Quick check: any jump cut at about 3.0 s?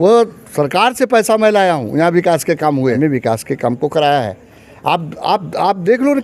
yes; 1 cut; at 3.0 s

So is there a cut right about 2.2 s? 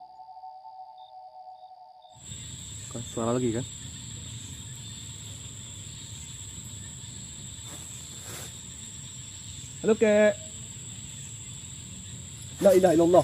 yes; 1 cut; at 2.2 s

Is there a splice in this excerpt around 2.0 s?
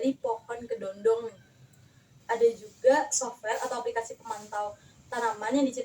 yes; 1 cut; at 2.0 s

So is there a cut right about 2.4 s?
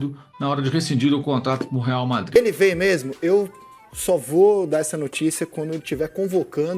yes; 1 cut; at 2.4 s

